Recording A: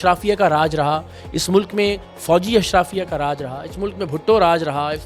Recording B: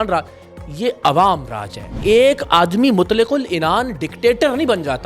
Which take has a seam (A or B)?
B